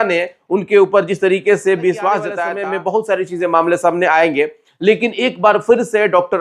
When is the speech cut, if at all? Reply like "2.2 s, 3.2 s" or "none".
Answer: 2.5 s